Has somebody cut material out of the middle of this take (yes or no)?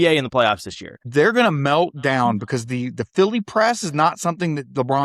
yes